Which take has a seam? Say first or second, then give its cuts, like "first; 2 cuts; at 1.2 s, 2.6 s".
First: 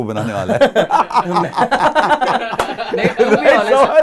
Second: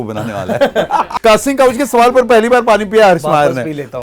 second; 1 cut; at 1.1 s